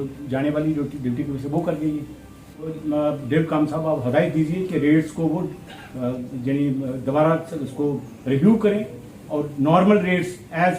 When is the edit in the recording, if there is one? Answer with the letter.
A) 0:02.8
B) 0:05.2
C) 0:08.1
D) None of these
A